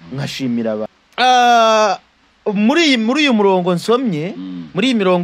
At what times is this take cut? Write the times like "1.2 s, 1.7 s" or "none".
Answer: 1.0 s

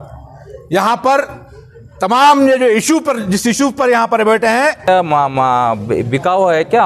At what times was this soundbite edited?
4.8 s

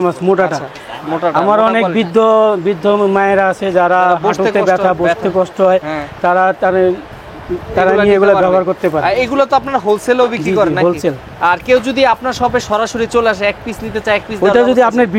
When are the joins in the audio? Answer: none

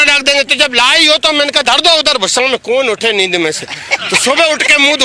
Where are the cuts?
none

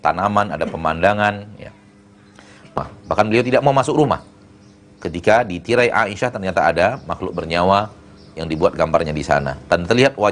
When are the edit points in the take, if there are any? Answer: 2.8 s

